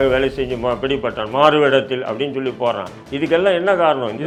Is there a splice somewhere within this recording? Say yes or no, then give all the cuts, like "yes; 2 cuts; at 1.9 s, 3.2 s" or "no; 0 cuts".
no; 0 cuts